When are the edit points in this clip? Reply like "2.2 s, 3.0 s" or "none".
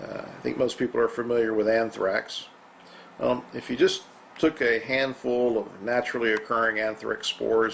none